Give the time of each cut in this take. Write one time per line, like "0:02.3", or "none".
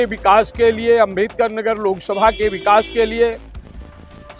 none

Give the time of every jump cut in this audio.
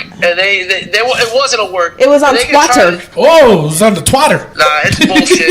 0:03.0
0:04.5

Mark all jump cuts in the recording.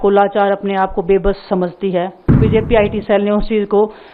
0:02.3

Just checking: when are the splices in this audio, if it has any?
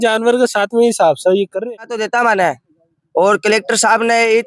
0:01.6

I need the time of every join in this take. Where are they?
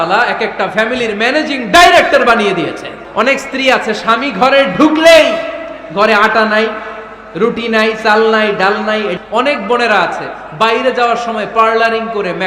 0:02.9
0:09.2

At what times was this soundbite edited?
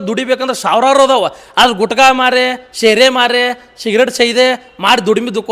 none

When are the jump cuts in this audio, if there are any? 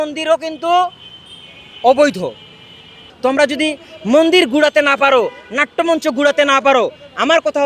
0:03.0

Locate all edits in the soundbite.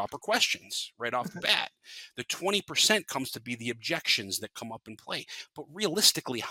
none

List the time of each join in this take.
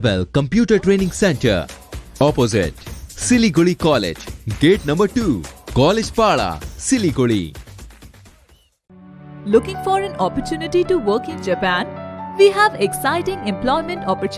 none

